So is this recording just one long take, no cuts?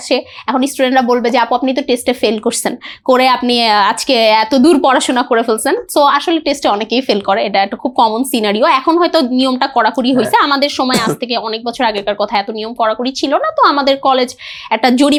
yes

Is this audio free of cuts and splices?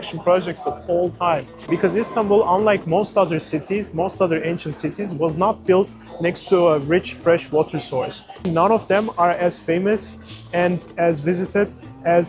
no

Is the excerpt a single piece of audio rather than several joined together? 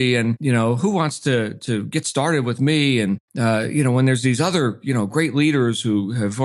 yes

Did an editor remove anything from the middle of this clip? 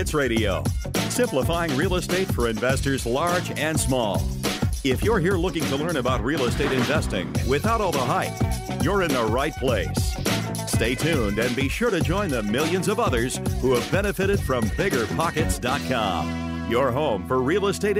no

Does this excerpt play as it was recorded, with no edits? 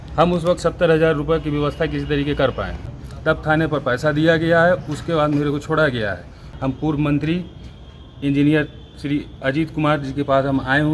no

